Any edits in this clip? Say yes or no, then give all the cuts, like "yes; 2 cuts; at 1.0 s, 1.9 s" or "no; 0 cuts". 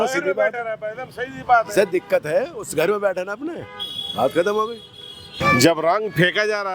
yes; 1 cut; at 5.3 s